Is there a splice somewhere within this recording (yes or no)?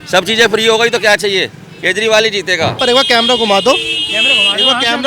yes